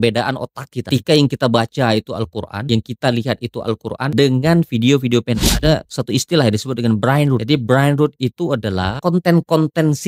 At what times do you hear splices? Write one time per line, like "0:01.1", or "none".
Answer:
0:00.9
0:02.6
0:04.1
0:05.6
0:07.4
0:09.0